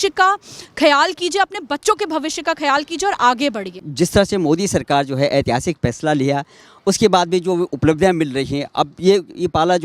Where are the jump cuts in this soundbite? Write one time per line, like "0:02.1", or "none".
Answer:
none